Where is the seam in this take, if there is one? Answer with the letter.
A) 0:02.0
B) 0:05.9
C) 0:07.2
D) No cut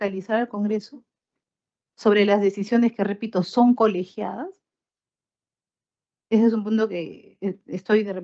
D